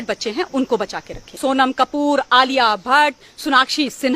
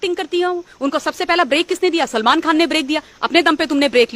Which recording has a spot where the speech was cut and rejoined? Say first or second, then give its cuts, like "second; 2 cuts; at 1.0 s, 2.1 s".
first; 1 cut; at 1.4 s